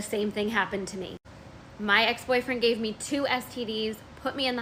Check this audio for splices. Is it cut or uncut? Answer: uncut